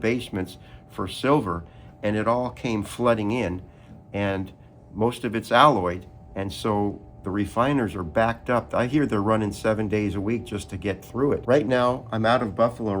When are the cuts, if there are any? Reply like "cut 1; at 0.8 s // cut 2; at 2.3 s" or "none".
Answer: cut 1; at 11.4 s